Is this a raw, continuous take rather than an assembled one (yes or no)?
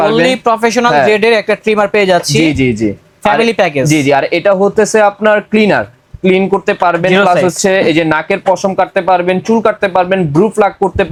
yes